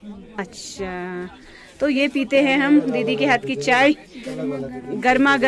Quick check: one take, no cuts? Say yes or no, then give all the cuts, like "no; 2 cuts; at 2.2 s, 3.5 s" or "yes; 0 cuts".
yes; 0 cuts